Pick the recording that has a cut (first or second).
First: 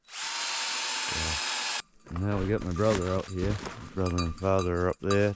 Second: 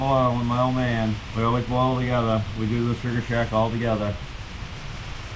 first